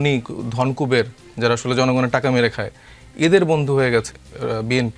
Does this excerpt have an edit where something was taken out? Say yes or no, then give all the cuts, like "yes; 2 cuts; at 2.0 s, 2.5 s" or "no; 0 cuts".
no; 0 cuts